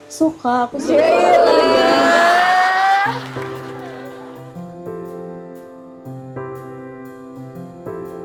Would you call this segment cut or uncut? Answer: uncut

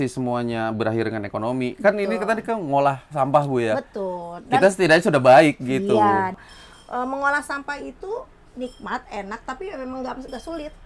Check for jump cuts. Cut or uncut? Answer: cut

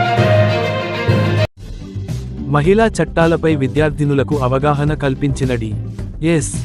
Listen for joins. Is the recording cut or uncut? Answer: cut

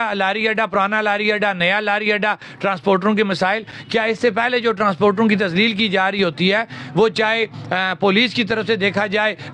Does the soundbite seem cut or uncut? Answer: uncut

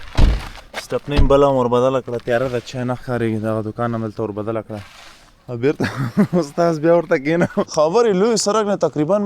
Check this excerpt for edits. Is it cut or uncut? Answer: cut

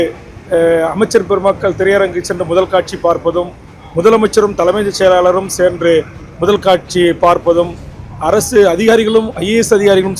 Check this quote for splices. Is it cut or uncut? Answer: uncut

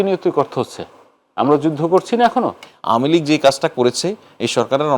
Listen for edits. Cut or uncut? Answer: cut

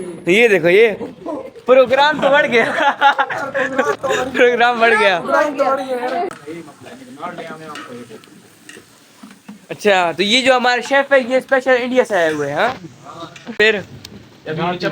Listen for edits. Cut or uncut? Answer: cut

